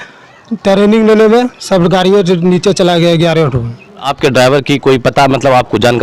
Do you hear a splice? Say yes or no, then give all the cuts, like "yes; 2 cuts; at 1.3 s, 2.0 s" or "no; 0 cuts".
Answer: yes; 1 cut; at 4.1 s